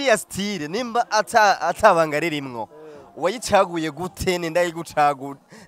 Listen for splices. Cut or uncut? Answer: uncut